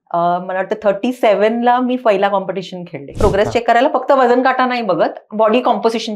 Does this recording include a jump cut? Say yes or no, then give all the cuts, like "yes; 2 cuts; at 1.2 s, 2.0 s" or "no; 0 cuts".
yes; 1 cut; at 3.1 s